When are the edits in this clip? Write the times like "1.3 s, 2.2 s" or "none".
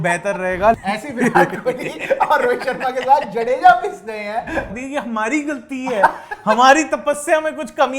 0.8 s, 4.7 s